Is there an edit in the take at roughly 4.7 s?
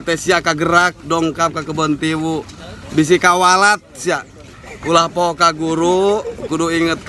yes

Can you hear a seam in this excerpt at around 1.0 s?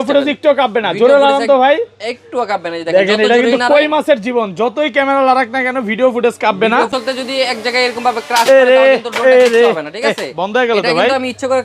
no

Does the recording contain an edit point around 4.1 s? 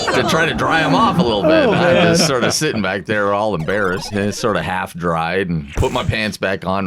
yes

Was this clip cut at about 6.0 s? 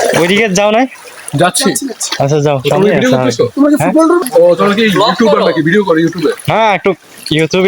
no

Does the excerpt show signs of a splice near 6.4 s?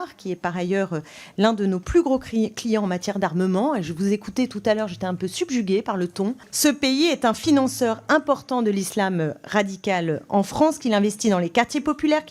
yes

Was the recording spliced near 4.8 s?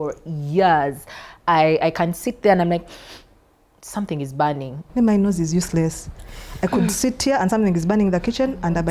yes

